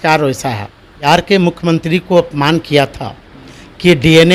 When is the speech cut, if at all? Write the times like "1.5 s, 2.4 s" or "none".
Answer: 1.1 s